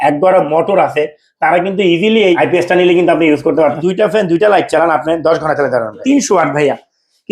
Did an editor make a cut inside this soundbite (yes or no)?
yes